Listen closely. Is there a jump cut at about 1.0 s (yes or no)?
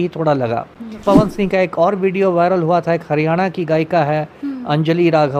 yes